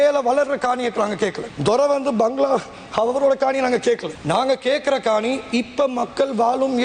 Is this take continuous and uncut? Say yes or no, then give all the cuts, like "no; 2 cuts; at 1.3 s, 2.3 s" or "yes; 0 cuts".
yes; 0 cuts